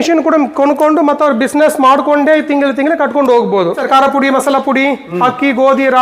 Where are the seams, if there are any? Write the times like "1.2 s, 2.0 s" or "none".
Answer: 3.8 s